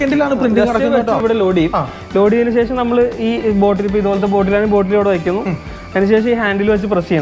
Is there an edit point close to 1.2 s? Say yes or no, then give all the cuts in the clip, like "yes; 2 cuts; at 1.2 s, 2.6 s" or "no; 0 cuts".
yes; 1 cut; at 1.2 s